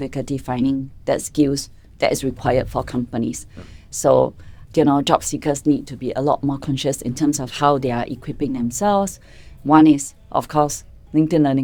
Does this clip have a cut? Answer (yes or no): no